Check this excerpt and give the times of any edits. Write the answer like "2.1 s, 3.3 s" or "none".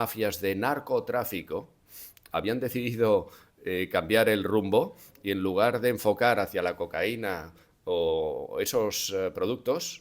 none